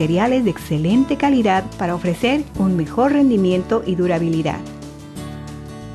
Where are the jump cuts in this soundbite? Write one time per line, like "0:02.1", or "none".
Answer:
0:04.6